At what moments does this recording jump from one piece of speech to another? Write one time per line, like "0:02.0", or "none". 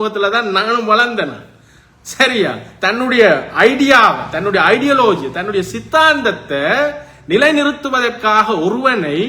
none